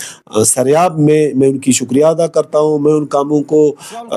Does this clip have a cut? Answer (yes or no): no